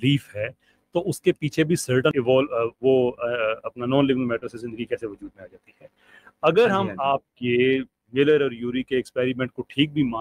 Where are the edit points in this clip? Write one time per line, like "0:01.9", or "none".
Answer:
0:02.1